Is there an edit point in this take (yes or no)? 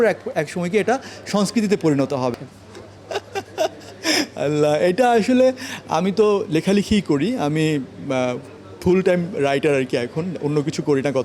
yes